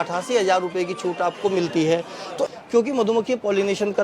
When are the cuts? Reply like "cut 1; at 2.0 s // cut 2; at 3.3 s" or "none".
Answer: cut 1; at 2.5 s